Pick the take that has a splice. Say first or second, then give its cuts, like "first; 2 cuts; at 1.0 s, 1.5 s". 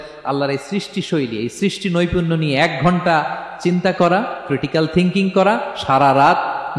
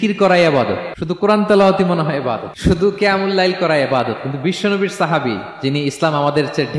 second; 2 cuts; at 0.9 s, 2.5 s